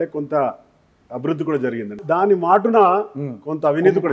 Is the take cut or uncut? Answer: cut